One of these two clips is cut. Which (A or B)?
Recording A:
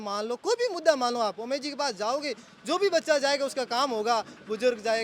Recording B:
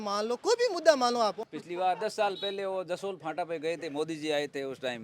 B